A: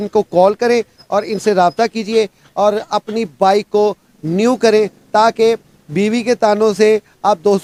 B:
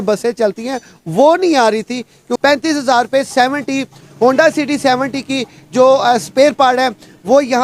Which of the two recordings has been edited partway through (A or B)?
B